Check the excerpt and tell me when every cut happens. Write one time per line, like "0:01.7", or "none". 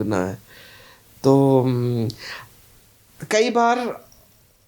none